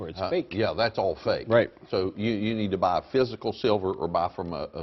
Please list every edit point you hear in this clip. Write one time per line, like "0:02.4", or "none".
0:02.2